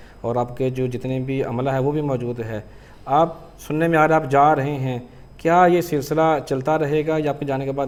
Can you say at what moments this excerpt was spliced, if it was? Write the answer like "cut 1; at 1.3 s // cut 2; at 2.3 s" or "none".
none